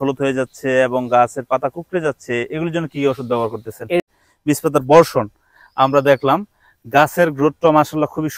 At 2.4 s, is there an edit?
no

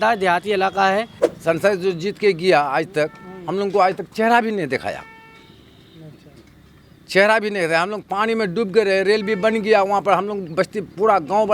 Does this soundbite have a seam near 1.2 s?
yes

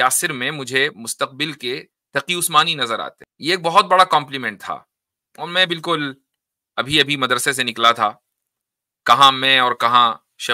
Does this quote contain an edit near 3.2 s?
yes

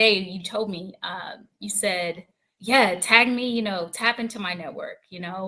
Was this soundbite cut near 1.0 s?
no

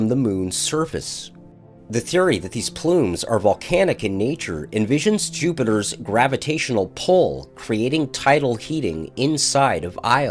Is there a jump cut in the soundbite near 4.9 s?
yes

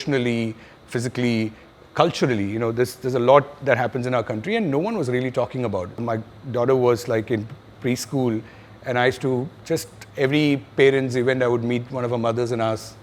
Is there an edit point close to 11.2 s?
no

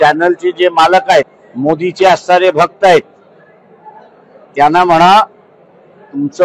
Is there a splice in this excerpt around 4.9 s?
no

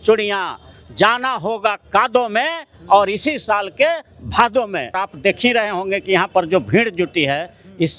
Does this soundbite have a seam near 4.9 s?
yes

